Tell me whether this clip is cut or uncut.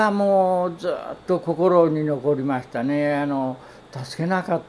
uncut